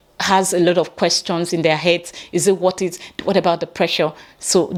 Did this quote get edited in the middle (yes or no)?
no